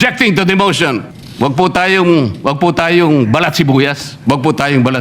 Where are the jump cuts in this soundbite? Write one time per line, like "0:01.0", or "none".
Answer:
0:01.2
0:04.1